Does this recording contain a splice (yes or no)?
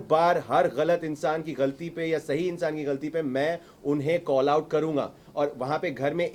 no